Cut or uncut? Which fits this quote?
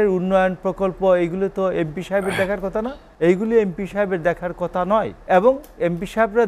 cut